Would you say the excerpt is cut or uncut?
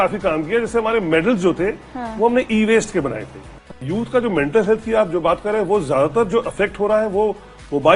cut